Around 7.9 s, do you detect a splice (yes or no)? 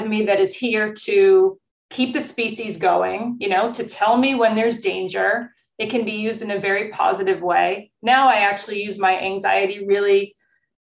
no